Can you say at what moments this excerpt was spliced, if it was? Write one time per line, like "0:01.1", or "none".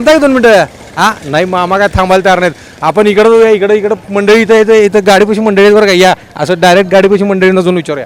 none